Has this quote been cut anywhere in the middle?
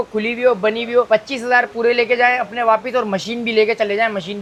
no; 0 cuts

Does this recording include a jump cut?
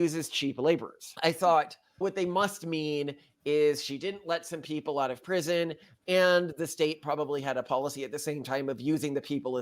yes; 2 cuts; at 1.0 s, 2.0 s

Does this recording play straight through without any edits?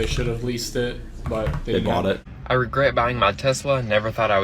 no; 1 cut; at 2.3 s

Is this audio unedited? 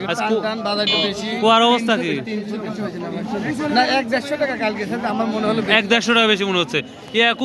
yes; 0 cuts

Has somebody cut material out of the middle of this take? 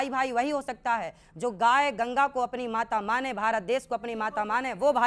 no; 0 cuts

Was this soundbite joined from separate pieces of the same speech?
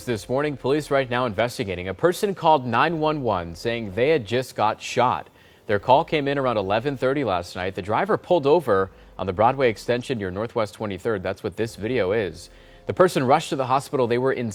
no; 0 cuts

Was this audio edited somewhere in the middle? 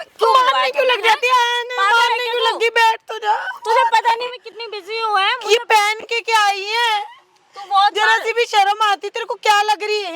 no; 0 cuts

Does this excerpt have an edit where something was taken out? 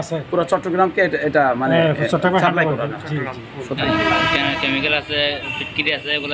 yes; 1 cut; at 3.8 s

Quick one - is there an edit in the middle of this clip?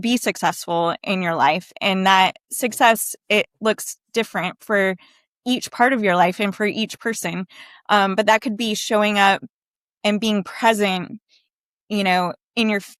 no; 0 cuts

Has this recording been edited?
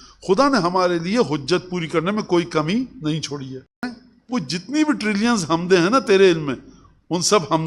yes; 1 cut; at 3.9 s

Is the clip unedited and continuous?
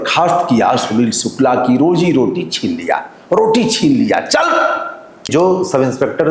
no; 1 cut; at 5.3 s

